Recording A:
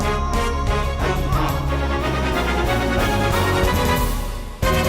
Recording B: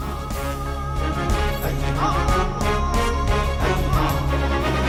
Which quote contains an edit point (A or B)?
A